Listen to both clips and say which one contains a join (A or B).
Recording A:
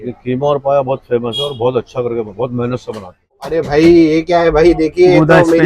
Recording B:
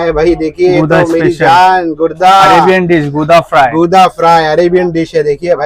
A